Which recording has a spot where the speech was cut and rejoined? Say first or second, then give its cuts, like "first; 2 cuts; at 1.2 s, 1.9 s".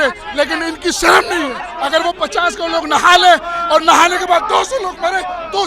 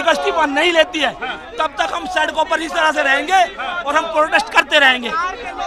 first; 1 cut; at 1.7 s